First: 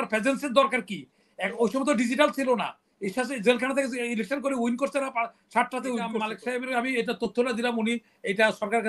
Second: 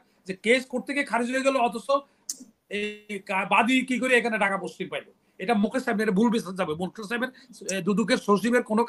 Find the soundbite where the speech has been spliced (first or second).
first